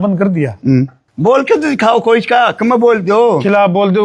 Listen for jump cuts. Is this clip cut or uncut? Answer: cut